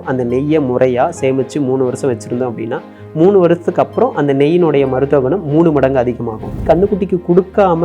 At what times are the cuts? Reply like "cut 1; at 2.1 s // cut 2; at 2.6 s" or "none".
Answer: cut 1; at 6.6 s